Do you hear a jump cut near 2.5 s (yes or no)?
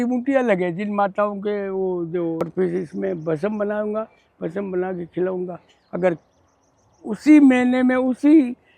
yes